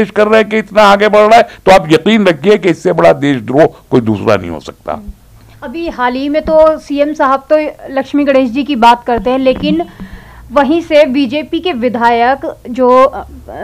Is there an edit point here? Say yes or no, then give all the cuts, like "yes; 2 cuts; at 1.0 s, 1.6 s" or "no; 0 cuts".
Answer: no; 0 cuts